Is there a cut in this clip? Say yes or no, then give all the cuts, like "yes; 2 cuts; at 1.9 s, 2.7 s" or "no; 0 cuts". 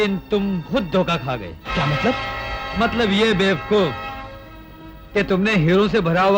no; 0 cuts